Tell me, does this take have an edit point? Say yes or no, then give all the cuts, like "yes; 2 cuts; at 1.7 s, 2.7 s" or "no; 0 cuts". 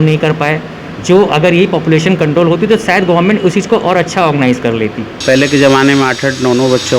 yes; 1 cut; at 5.1 s